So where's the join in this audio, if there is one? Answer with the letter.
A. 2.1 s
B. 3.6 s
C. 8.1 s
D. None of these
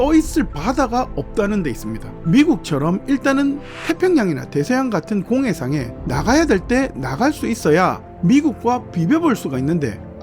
C